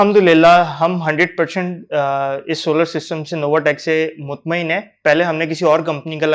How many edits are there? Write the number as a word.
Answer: zero